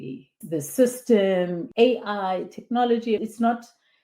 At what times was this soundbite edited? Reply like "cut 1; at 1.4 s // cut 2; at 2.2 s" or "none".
cut 1; at 1.6 s // cut 2; at 3.2 s